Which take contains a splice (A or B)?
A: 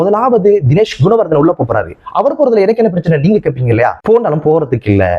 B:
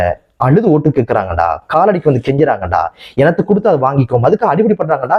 A